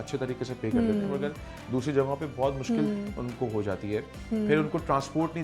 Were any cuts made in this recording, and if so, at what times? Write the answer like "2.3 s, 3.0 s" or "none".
none